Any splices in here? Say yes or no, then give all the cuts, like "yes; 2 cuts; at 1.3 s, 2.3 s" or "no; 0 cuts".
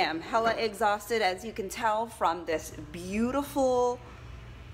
no; 0 cuts